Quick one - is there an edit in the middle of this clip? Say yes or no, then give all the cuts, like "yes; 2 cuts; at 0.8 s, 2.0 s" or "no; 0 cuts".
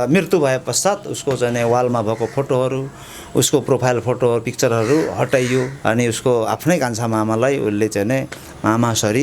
yes; 1 cut; at 5.7 s